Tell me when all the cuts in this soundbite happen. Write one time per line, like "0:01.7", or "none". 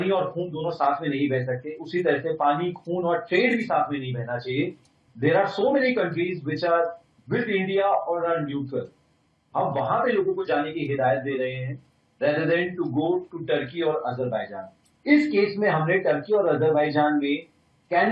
none